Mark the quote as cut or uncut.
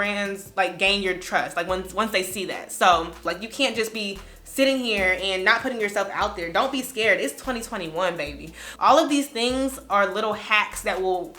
cut